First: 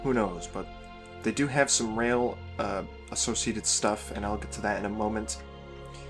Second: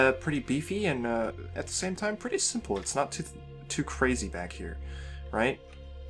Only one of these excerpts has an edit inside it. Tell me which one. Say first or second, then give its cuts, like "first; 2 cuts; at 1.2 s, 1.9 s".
first; 1 cut; at 1.9 s